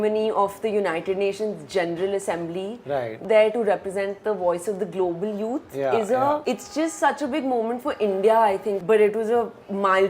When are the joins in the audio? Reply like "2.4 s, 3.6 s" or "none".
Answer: 3.2 s, 6.4 s, 8.8 s